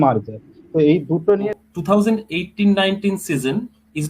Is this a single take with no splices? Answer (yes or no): no